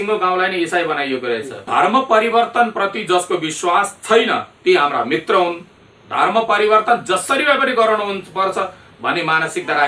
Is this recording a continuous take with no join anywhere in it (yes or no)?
no